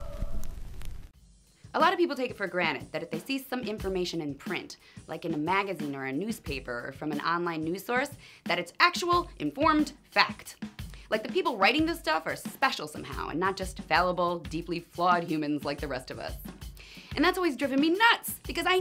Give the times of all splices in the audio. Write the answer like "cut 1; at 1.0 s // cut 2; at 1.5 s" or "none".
cut 1; at 14.1 s